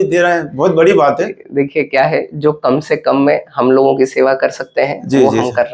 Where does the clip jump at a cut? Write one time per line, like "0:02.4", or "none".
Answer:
none